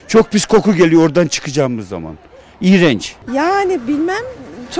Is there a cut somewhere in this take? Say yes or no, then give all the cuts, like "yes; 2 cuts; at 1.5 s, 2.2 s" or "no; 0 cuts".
no; 0 cuts